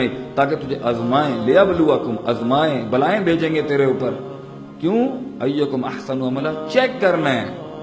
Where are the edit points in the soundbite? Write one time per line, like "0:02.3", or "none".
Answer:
none